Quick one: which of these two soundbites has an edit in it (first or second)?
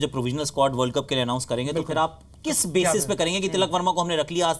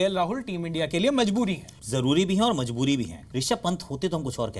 second